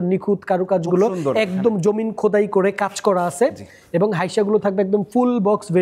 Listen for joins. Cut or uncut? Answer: uncut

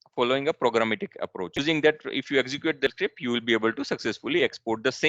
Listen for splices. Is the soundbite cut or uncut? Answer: cut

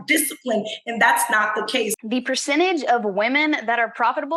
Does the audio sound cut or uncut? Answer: cut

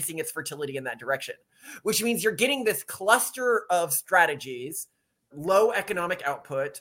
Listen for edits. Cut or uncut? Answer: cut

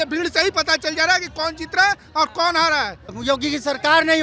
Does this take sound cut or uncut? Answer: cut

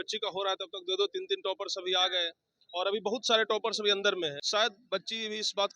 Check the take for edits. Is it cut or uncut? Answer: cut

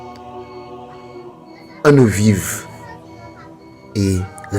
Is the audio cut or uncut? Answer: cut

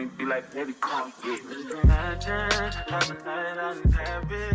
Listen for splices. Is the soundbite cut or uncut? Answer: uncut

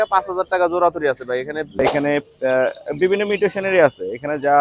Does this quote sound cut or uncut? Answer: cut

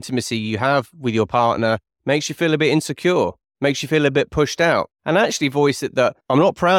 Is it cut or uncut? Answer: uncut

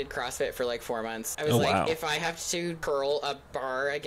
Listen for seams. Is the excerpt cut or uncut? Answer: cut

